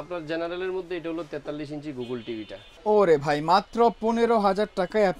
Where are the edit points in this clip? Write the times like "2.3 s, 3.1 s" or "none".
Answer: 2.6 s